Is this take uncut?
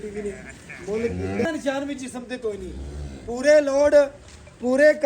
no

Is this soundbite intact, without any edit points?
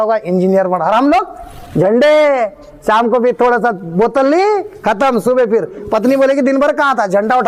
yes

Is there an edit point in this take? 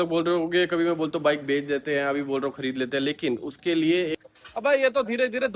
yes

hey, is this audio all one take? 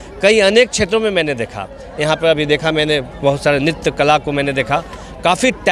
yes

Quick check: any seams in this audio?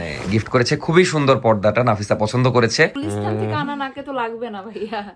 yes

